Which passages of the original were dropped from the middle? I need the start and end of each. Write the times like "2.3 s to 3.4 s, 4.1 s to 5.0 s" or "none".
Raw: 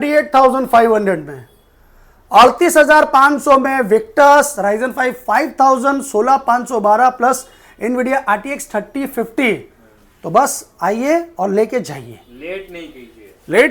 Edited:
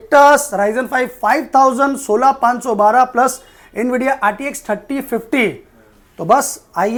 none